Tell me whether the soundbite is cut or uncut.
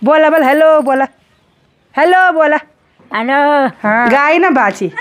cut